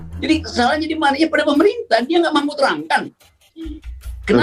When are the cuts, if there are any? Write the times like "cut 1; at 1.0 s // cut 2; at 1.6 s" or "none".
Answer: none